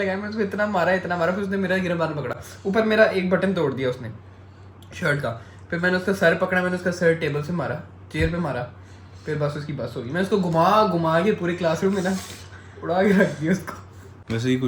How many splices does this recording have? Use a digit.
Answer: 0